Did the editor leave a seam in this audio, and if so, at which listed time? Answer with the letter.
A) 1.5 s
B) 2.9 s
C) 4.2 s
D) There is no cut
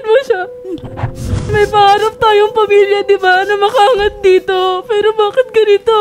A